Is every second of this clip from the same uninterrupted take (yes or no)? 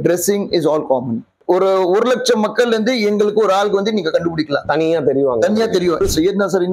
no